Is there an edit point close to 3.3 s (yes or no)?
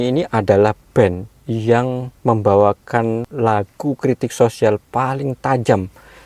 yes